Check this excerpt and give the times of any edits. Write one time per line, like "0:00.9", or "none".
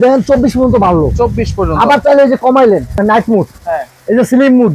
0:03.0